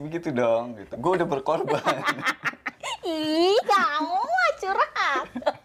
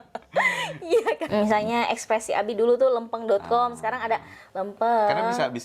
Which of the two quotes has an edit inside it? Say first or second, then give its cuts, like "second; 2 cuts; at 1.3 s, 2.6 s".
second; 1 cut; at 1.3 s